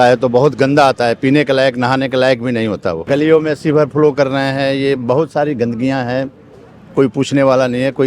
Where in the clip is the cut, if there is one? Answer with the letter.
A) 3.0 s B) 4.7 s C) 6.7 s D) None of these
A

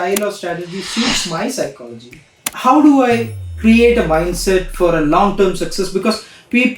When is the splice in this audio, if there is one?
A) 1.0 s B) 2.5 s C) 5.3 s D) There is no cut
B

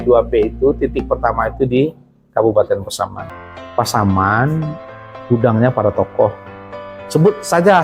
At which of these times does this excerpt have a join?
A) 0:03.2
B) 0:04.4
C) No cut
A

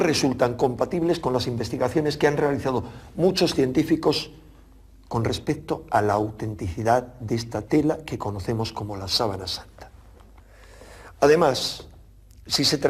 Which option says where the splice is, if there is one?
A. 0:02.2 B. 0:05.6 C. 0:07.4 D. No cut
B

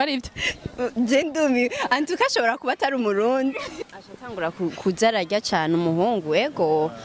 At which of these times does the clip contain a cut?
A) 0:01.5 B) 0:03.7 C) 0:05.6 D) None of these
B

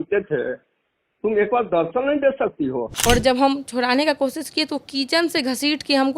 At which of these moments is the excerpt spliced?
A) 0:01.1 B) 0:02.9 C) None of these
B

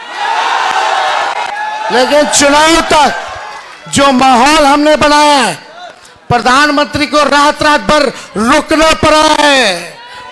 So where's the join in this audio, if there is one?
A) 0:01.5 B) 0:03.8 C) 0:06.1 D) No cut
A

